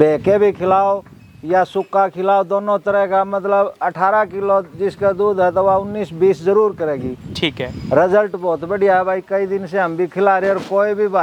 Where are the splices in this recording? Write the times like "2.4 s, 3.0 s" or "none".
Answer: none